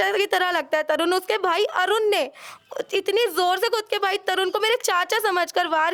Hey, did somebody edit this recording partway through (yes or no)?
no